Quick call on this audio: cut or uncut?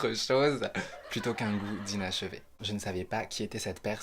cut